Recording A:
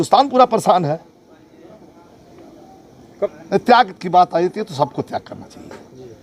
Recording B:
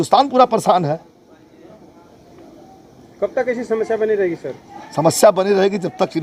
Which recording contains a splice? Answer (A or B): A